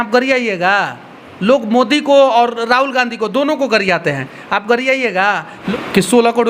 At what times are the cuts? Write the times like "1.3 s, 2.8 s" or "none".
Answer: 5.5 s